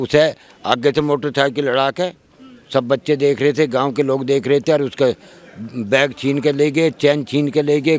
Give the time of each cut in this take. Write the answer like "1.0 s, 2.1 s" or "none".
none